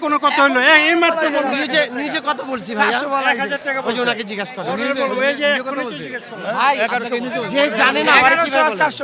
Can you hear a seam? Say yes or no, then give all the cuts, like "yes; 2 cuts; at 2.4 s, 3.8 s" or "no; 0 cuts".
no; 0 cuts